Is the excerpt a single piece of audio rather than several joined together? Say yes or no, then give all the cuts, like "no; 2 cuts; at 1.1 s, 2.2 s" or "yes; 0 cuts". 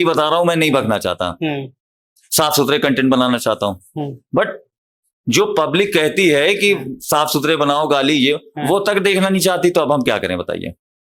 yes; 0 cuts